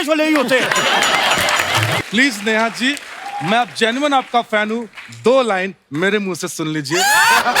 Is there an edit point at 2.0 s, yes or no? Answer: yes